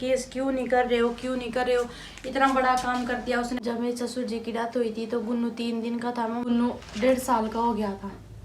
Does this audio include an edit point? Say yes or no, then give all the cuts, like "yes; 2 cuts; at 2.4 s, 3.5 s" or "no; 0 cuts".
yes; 2 cuts; at 3.6 s, 6.4 s